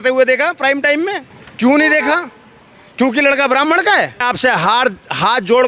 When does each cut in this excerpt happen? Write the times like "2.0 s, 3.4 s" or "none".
4.3 s